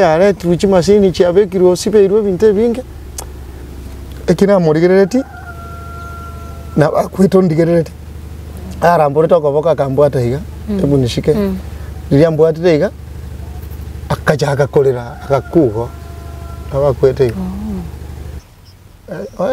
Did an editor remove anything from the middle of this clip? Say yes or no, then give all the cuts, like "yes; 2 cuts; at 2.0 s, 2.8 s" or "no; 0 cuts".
yes; 1 cut; at 18.4 s